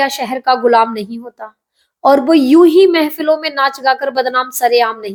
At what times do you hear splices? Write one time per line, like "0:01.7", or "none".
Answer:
none